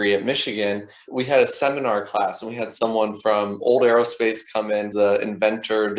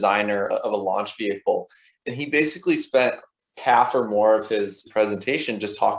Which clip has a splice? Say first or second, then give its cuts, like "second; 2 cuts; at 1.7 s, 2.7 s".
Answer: first; 2 cuts; at 1.1 s, 4.9 s